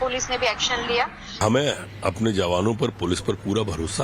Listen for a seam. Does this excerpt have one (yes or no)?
yes